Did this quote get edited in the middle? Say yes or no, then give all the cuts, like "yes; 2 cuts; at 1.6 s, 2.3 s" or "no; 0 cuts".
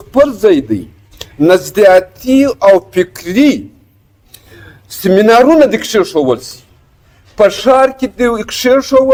no; 0 cuts